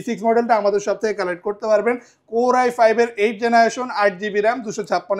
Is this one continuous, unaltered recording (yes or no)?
yes